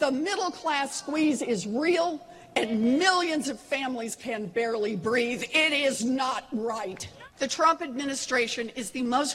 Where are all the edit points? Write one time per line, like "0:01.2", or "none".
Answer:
0:01.9
0:07.2